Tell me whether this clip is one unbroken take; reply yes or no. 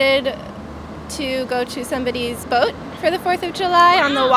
yes